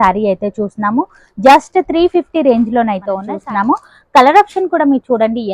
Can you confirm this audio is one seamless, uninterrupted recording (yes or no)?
no